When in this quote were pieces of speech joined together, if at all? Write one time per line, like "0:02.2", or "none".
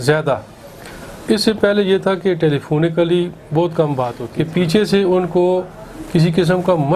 0:04.2